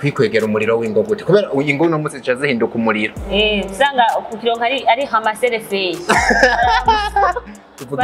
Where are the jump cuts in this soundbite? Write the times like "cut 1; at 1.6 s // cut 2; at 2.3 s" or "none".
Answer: none